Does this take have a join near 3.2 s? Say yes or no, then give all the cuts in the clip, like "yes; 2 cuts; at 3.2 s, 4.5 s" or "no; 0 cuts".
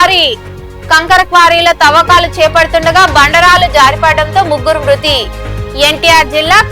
no; 0 cuts